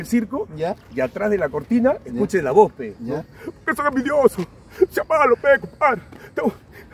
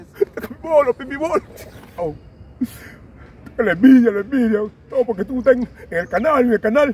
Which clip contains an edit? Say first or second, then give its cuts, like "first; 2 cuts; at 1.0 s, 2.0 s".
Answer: second; 1 cut; at 2.0 s